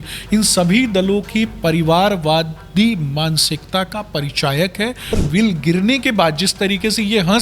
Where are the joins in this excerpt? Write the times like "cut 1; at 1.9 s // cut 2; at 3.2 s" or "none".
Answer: cut 1; at 5.1 s